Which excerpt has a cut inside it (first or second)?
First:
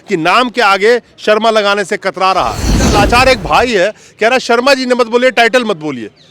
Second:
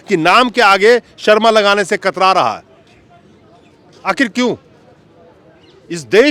first